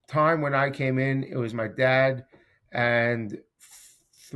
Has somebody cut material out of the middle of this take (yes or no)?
no